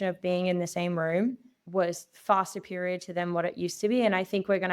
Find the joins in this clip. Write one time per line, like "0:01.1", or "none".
0:01.5